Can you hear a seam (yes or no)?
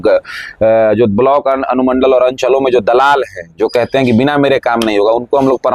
no